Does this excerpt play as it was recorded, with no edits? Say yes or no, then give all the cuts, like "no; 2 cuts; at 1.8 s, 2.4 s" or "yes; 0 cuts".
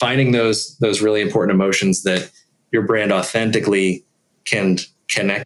yes; 0 cuts